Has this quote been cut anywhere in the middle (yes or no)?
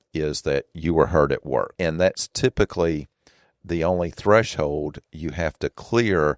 yes